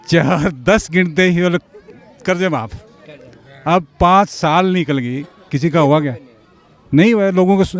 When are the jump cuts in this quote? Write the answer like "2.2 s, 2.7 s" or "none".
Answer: none